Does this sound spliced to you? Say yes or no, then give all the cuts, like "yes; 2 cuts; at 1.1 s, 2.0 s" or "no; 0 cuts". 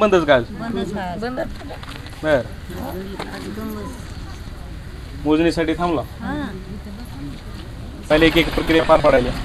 yes; 1 cut; at 8.0 s